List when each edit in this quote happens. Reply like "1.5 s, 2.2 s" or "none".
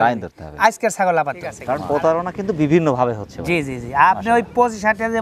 1.5 s